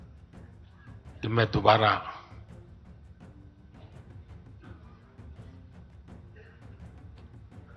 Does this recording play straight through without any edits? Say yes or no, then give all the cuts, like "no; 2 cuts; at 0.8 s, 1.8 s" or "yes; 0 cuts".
no; 2 cuts; at 1.2 s, 2.3 s